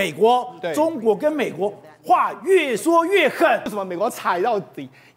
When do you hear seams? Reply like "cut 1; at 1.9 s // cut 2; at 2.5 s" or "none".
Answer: cut 1; at 3.7 s